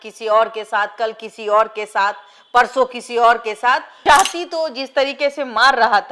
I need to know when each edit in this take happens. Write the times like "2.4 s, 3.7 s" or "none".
4.0 s